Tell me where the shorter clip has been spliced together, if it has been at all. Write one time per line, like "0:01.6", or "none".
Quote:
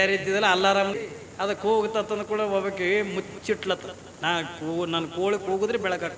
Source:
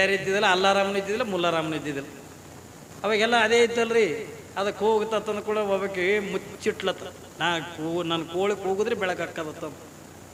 0:00.9